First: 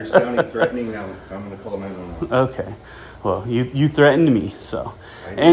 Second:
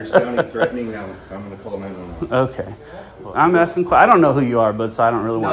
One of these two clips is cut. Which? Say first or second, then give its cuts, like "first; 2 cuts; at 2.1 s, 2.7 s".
second; 1 cut; at 3.1 s